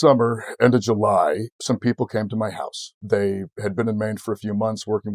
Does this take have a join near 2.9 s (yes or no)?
yes